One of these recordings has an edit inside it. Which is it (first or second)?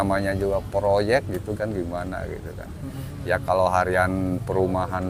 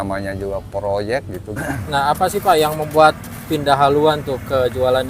second